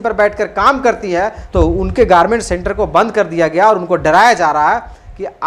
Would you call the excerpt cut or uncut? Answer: cut